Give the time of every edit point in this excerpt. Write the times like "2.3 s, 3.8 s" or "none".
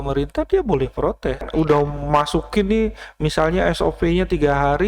1.4 s